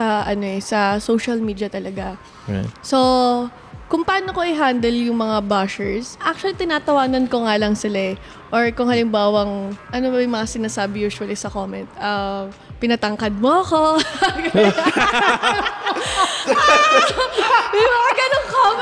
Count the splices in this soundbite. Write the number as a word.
two